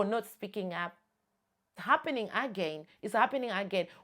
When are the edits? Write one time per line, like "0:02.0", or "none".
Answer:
0:01.8